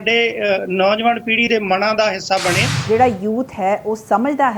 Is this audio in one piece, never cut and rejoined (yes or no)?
no